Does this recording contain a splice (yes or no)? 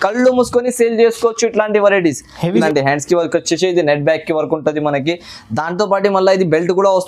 yes